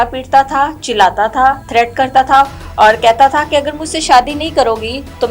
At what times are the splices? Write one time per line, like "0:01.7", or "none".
0:01.6

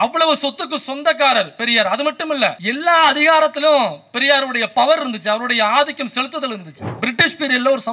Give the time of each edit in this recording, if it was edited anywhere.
0:02.6
0:06.8

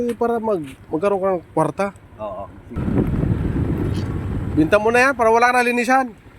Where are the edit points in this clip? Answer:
0:02.8

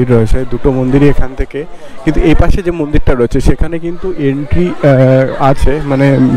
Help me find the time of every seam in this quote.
none

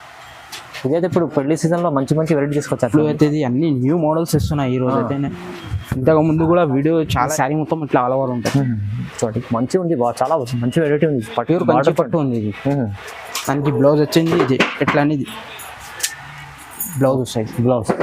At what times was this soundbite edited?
0:07.3

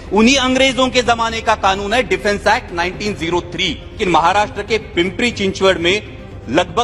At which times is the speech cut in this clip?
0:04.0

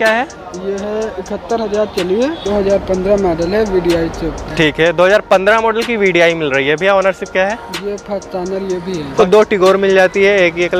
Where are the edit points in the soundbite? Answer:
0:02.4
0:09.1

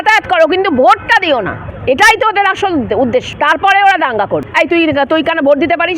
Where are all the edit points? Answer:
0:01.6
0:03.3
0:04.5

